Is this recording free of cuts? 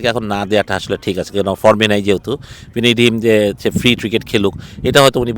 yes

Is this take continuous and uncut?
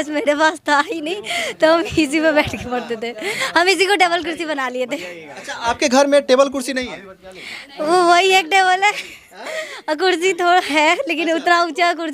yes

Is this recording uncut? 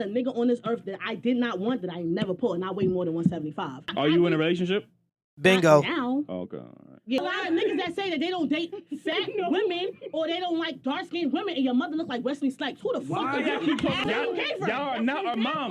no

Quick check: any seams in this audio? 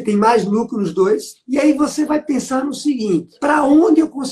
yes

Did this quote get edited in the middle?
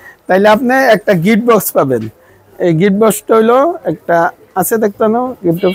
no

